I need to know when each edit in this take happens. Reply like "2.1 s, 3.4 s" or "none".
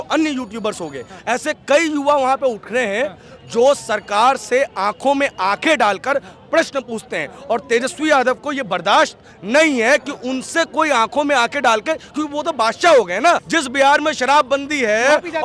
1.1 s, 13.5 s